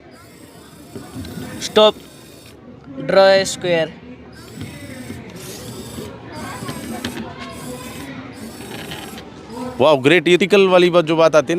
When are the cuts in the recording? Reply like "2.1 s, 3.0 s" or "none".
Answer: 10.4 s